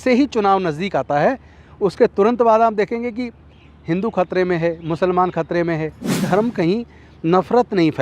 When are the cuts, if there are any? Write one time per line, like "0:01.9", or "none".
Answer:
0:06.2